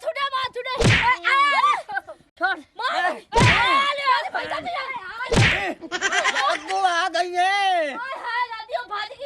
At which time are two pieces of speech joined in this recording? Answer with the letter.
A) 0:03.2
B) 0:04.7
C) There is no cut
C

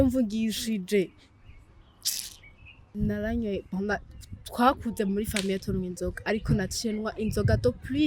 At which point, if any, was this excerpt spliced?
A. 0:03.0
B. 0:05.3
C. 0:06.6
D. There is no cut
A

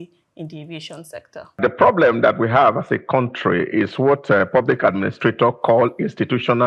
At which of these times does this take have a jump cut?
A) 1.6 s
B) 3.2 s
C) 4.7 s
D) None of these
A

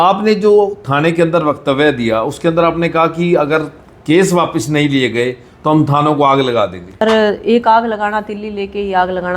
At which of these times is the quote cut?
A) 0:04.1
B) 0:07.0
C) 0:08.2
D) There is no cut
B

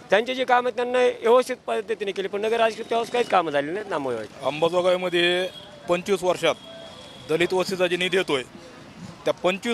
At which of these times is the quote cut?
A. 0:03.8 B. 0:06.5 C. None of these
A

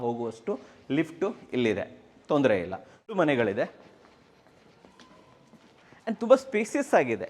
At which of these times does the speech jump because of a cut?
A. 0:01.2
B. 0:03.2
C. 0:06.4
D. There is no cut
B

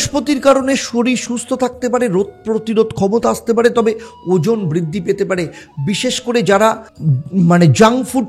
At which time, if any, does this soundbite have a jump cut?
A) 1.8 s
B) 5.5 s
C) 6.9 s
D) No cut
C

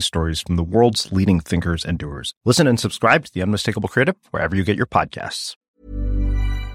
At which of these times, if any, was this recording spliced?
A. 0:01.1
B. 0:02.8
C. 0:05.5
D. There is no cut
C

